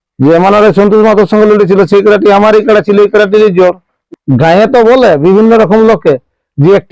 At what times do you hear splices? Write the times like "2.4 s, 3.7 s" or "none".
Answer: 3.9 s